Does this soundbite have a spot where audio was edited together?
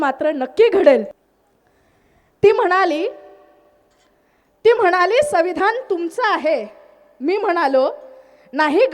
no; 0 cuts

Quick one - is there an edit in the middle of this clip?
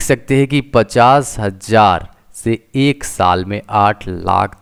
no; 0 cuts

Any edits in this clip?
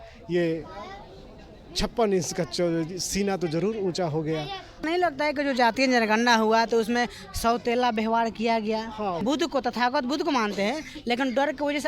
yes; 2 cuts; at 4.8 s, 9.2 s

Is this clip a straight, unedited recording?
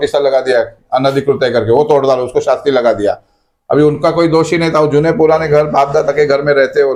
yes; 0 cuts

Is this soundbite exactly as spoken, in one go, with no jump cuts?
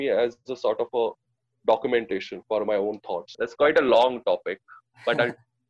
no; 1 cut; at 3.3 s

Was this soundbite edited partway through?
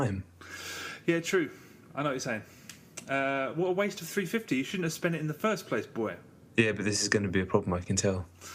yes; 1 cut; at 1.4 s

